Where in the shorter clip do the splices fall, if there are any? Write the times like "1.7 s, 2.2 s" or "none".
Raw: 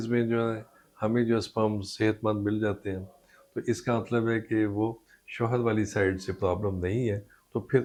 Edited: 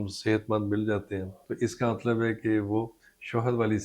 1.4 s

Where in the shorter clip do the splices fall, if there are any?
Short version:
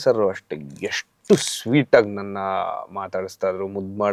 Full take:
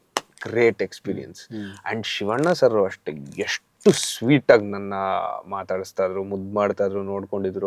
none

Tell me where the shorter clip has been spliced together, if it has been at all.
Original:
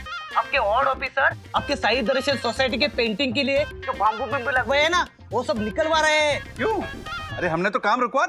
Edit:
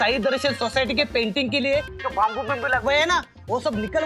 none

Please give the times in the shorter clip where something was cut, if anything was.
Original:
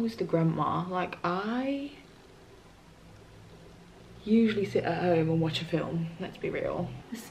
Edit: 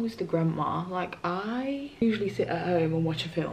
2.0 s

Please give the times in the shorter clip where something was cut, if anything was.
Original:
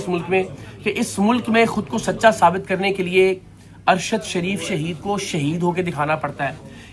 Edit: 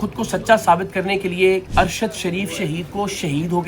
1.7 s

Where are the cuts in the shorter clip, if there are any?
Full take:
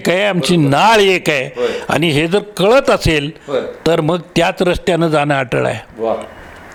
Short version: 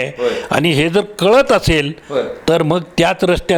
none

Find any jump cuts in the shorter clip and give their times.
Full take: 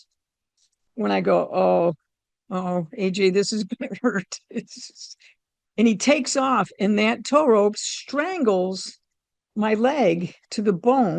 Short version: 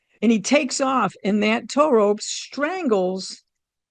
none

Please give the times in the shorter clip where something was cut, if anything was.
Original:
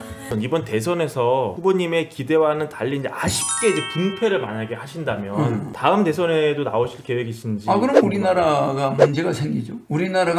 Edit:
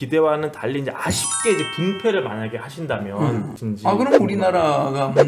3.5 s

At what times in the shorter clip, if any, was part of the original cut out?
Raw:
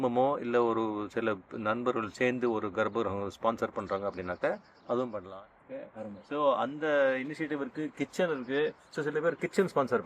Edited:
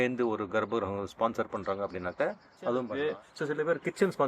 2.9 s

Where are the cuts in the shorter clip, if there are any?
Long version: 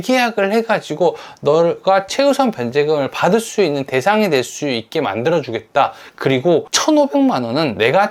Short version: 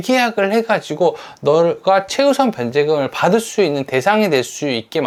none

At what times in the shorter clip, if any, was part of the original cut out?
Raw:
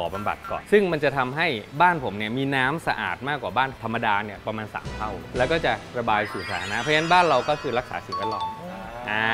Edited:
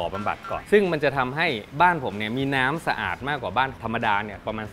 none

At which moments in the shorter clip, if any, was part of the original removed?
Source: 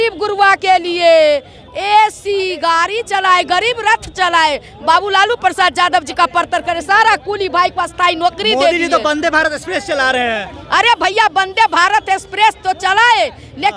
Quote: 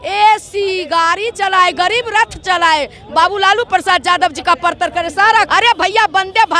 5.5 s

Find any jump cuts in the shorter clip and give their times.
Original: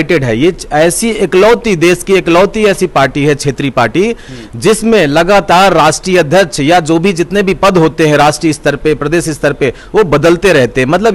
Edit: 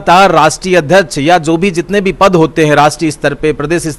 none

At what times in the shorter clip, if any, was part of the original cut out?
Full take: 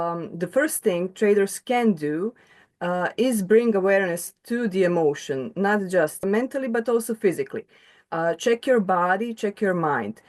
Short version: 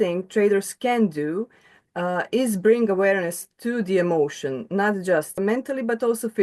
none

